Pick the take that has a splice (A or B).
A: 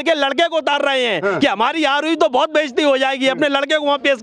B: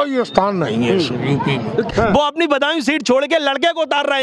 B